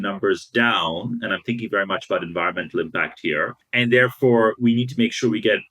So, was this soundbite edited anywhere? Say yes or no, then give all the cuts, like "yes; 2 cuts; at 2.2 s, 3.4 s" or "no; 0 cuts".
yes; 1 cut; at 3.6 s